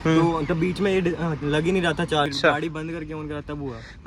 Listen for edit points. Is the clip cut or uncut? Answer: cut